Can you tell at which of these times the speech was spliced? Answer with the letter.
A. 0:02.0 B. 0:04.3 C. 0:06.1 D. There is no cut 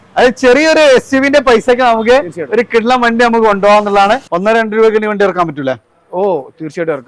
B